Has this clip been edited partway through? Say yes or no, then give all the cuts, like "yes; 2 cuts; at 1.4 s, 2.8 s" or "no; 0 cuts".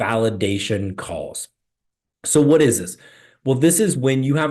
no; 0 cuts